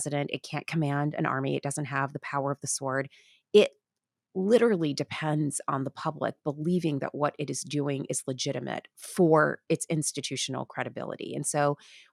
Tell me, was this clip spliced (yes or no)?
no